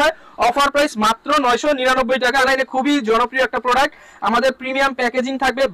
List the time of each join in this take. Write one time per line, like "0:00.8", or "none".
0:02.4